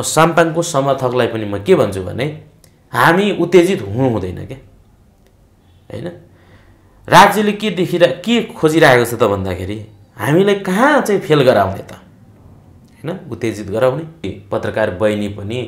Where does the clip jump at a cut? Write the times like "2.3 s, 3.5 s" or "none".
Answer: 14.4 s